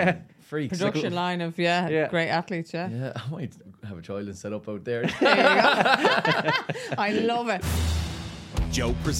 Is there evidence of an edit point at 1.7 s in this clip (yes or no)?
no